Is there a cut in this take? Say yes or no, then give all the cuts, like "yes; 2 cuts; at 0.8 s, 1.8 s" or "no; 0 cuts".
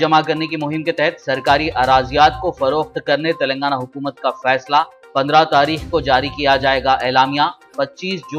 no; 0 cuts